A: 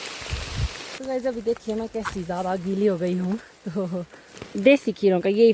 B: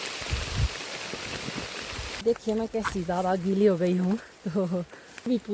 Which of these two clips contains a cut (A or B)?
A